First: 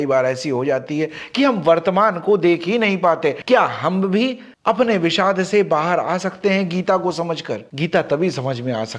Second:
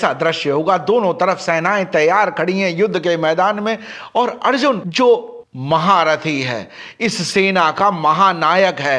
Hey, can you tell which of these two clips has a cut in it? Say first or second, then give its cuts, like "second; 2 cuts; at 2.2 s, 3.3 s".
first; 2 cuts; at 3.4 s, 7.6 s